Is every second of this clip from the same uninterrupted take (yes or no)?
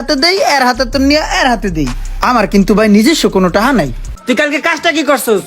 no